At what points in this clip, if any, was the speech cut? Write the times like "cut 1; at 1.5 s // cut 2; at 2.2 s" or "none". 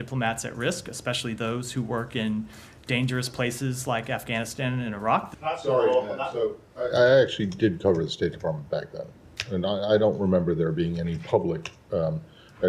cut 1; at 5.3 s